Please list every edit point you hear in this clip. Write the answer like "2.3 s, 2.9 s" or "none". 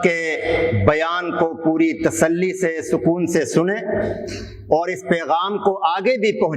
none